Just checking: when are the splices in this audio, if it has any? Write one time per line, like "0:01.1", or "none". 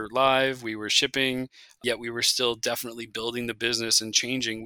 0:01.8